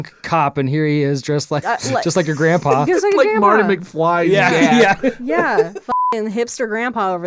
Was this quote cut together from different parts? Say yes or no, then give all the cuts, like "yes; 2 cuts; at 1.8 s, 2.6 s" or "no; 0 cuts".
yes; 2 cuts; at 1.6 s, 5.9 s